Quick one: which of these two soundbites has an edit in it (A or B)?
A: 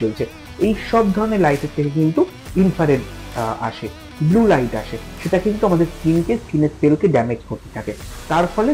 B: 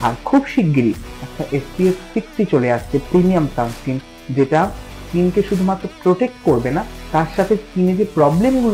B